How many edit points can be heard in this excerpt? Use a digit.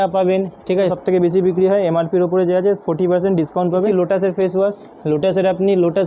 2